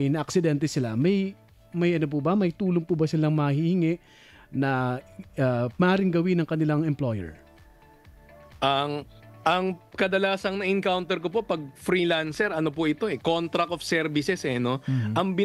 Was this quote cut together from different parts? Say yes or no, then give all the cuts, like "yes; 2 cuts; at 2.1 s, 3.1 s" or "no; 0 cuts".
no; 0 cuts